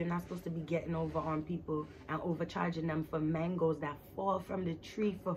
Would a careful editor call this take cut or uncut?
uncut